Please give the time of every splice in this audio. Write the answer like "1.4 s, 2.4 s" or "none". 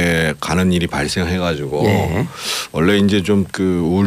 1.7 s

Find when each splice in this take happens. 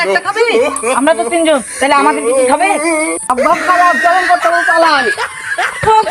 none

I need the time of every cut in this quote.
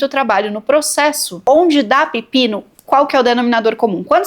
1.3 s

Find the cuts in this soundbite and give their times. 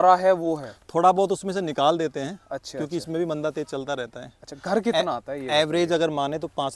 none

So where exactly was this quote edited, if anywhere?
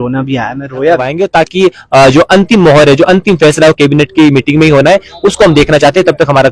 1.1 s

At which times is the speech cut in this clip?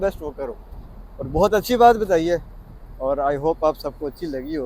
none

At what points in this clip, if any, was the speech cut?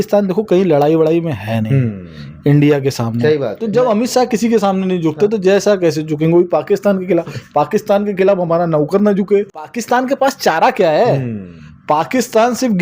3.6 s, 9.5 s

